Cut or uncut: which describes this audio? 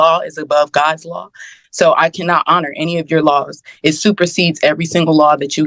uncut